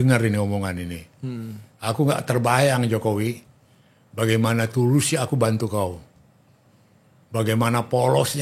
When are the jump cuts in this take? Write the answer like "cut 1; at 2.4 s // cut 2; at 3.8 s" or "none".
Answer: none